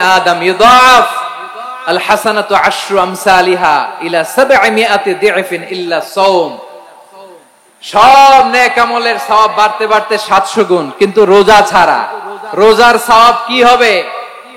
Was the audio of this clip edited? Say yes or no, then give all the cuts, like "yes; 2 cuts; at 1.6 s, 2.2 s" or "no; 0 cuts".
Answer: no; 0 cuts